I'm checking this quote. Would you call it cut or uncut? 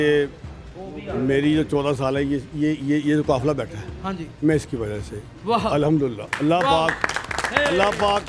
uncut